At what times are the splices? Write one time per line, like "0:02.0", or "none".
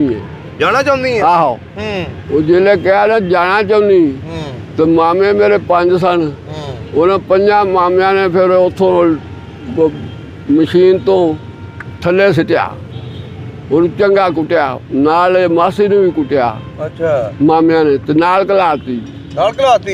none